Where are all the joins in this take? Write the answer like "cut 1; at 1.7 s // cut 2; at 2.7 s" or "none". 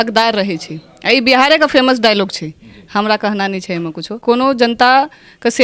cut 1; at 4.2 s